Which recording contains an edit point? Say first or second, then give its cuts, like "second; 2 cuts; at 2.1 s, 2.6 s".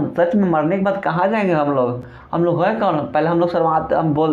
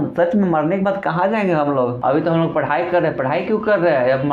second; 1 cut; at 2.0 s